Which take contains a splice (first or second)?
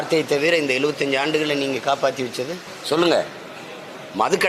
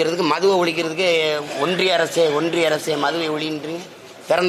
first